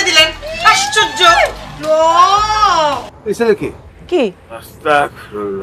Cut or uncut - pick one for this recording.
cut